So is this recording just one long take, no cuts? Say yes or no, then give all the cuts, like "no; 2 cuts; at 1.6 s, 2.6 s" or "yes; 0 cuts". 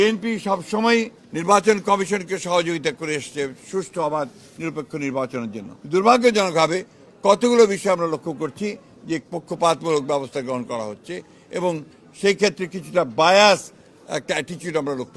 no; 2 cuts; at 1.2 s, 5.7 s